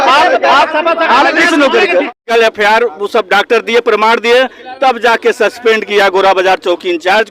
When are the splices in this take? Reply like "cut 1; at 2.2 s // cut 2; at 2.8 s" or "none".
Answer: cut 1; at 2.1 s